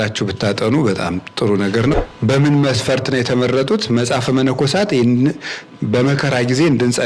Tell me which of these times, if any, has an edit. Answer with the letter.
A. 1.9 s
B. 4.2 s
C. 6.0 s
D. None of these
A